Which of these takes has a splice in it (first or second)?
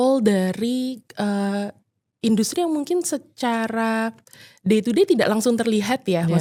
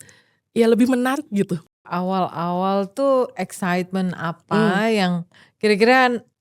second